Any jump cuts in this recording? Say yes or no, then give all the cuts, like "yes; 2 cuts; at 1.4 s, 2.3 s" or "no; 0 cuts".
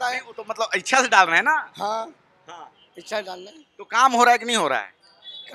no; 0 cuts